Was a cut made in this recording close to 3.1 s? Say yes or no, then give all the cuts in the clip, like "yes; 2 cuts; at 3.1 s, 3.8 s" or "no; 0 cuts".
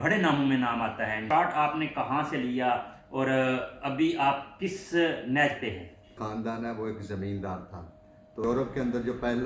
no; 3 cuts; at 1.2 s, 6.2 s, 8.4 s